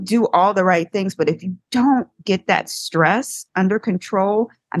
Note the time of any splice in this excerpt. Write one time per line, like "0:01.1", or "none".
none